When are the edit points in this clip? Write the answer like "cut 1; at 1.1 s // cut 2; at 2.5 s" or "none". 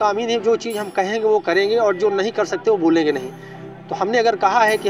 none

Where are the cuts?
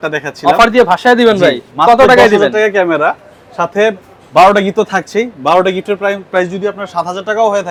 none

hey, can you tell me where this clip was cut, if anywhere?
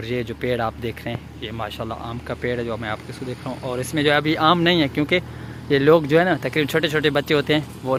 none

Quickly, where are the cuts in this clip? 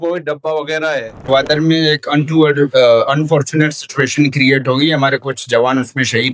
cut 1; at 1.3 s

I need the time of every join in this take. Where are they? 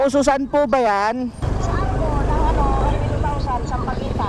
cut 1; at 1.5 s

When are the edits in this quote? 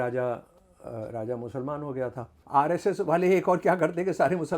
cut 1; at 2.3 s

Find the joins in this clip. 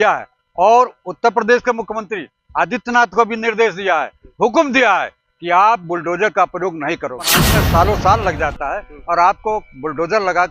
cut 1; at 7.4 s

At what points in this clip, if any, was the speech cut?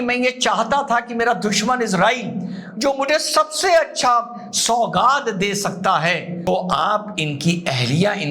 cut 1; at 6.4 s

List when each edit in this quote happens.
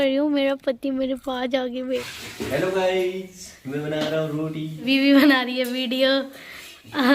cut 1; at 2.2 s // cut 2; at 4.9 s

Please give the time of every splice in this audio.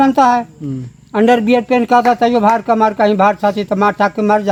none

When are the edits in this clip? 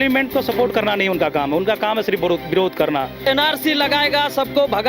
cut 1; at 3.3 s

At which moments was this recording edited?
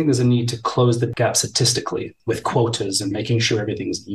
cut 1; at 2.1 s

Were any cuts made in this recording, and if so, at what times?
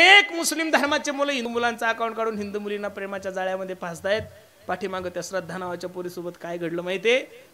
cut 1; at 1.5 s

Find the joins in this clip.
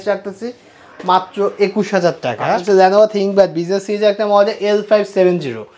cut 1; at 2.6 s

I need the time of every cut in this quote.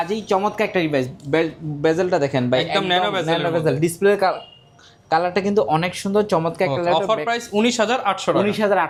none

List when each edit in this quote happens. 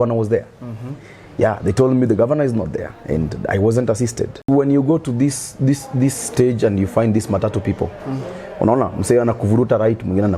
cut 1; at 4.5 s

